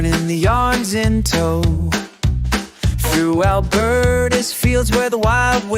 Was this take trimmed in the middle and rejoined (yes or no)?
no